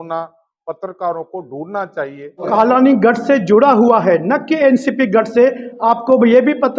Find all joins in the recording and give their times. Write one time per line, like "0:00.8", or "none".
0:02.5